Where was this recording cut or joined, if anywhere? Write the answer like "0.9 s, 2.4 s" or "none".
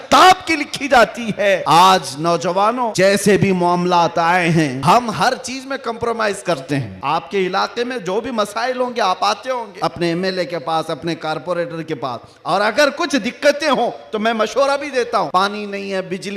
1.6 s, 2.9 s, 4.8 s, 6.9 s, 9.7 s, 15.3 s